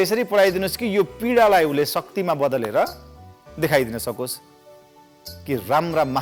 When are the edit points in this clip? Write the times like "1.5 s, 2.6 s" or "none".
none